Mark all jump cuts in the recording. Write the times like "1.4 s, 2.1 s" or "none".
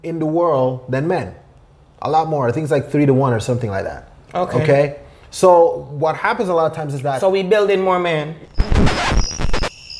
none

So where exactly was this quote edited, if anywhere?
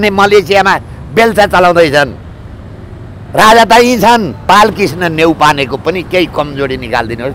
4.3 s

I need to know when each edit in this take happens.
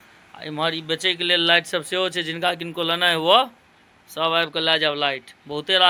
none

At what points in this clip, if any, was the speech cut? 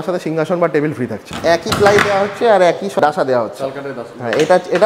1.3 s, 3.0 s

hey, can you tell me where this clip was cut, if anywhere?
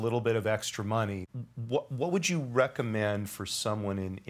1.2 s

